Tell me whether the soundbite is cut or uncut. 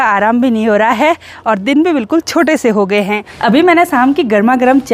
uncut